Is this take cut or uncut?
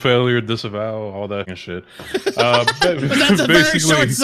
cut